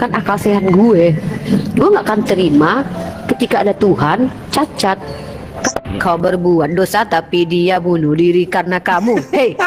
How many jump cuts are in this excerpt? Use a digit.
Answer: 1